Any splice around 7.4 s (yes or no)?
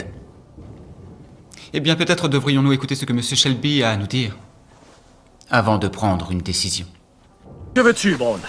yes